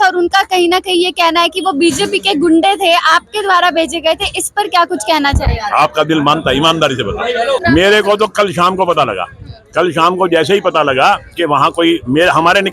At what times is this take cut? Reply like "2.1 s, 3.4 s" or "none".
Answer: 7.6 s